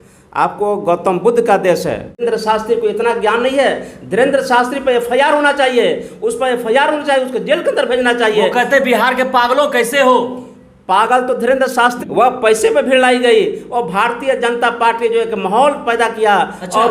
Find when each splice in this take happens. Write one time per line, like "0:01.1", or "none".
0:02.2
0:12.0